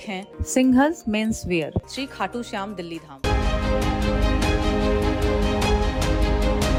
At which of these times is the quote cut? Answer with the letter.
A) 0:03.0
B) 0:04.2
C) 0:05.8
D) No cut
D